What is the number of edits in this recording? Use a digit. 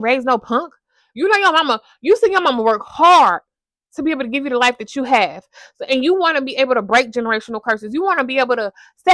0